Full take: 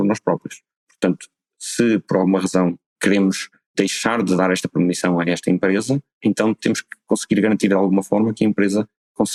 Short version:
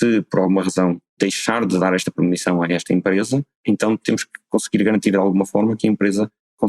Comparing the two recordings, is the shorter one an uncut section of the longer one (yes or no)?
no